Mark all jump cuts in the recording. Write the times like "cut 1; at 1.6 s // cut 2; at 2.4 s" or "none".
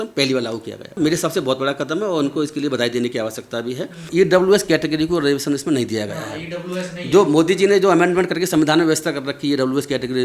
cut 1; at 1.0 s // cut 2; at 4.1 s